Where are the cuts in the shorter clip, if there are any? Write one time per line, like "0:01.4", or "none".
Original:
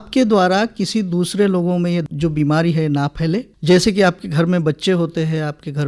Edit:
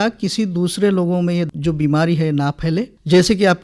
none